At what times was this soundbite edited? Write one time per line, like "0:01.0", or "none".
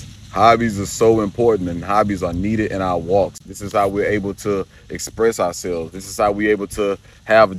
none